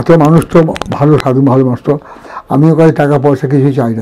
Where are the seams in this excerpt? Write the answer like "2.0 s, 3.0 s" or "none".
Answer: none

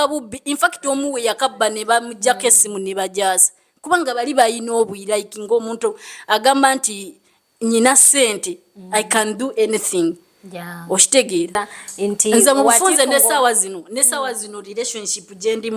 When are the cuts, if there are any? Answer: 11.6 s

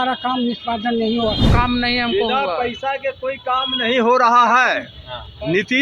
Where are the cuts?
1.5 s

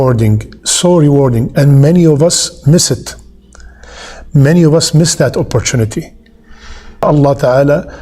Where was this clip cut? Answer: 7.0 s

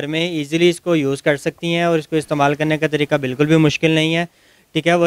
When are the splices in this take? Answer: none

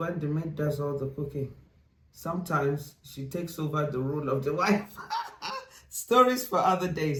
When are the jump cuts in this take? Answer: none

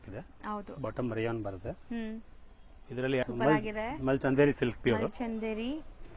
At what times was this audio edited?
3.2 s

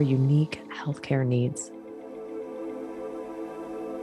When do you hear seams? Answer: 1.6 s

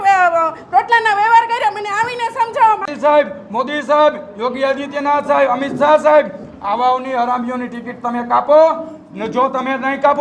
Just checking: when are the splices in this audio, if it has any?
2.9 s

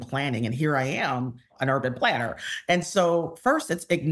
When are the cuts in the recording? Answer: 1.5 s

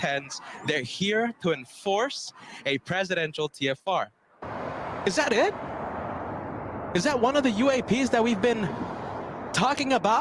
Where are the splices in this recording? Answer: 4.4 s

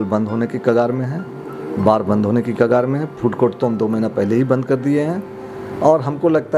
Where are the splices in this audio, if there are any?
none

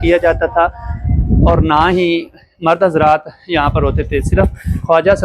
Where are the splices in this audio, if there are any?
none

